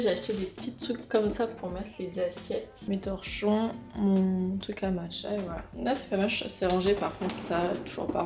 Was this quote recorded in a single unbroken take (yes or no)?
no